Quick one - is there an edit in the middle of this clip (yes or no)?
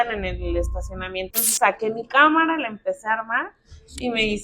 yes